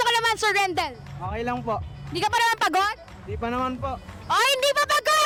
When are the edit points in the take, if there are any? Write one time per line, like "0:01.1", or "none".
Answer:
none